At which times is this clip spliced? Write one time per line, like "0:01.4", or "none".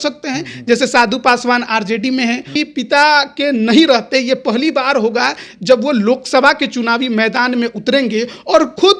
0:02.6